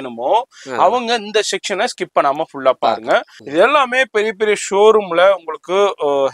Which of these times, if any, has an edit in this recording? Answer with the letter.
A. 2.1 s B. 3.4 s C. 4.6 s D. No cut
B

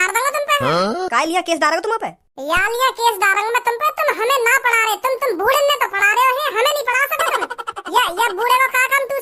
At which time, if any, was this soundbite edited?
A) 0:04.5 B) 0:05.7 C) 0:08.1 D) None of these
D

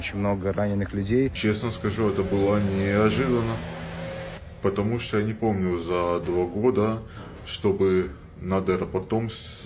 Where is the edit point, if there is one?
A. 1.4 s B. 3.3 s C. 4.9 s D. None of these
A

